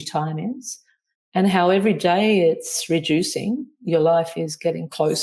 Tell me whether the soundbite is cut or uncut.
uncut